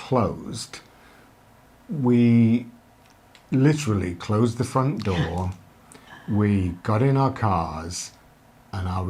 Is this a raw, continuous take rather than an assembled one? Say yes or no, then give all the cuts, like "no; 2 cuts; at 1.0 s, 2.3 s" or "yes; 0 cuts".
yes; 0 cuts